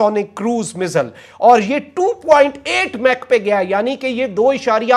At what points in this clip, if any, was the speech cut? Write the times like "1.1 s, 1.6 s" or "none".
none